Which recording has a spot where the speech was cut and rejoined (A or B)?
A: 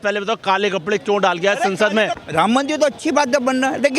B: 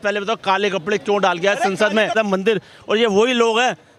A